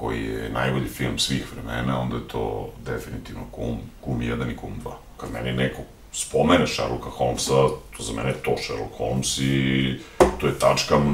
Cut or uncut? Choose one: cut